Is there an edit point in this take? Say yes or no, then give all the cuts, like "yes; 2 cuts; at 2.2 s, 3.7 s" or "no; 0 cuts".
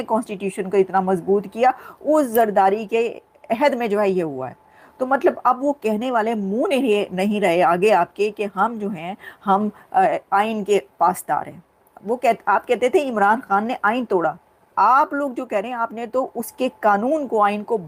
no; 0 cuts